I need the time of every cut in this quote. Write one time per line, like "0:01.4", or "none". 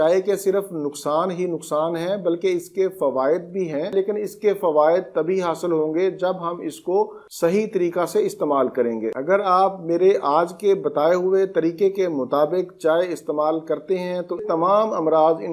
0:03.9
0:09.1
0:14.4